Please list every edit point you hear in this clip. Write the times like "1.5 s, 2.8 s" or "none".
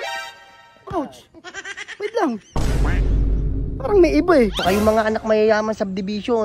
4.6 s